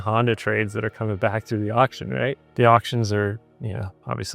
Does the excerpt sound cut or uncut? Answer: cut